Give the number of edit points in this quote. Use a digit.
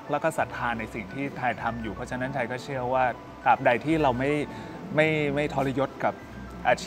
0